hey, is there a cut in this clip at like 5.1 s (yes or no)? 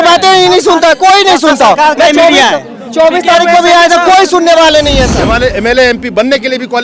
yes